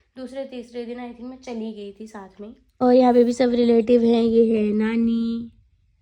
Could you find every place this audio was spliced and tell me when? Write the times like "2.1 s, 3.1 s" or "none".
2.8 s